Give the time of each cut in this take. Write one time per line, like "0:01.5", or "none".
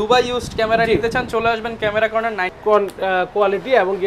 0:02.5